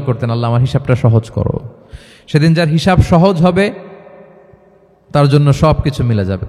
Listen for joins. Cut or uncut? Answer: uncut